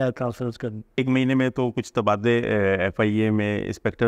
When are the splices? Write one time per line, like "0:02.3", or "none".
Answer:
0:01.0